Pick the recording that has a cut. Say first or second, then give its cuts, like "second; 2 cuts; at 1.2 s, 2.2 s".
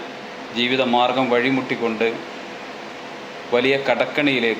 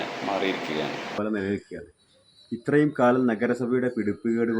second; 1 cut; at 1.2 s